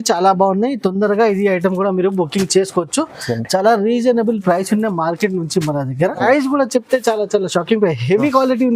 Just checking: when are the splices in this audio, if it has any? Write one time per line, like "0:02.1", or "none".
0:06.2

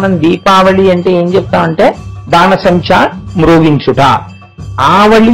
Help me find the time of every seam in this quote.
none

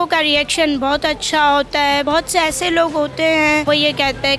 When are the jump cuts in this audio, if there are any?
0:02.0
0:03.6

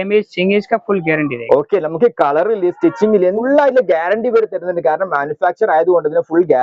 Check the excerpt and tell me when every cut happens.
0:03.4

